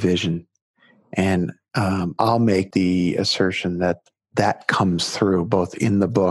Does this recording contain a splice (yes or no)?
yes